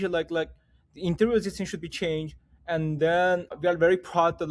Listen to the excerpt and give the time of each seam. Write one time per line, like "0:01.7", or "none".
0:03.5